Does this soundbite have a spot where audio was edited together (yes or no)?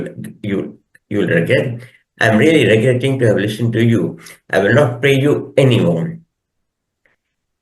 no